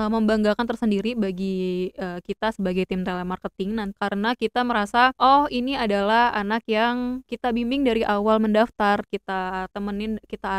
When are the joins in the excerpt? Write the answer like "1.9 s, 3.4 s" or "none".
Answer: 3.9 s, 5.2 s, 7.3 s